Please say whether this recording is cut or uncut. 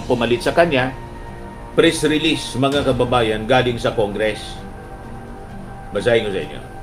cut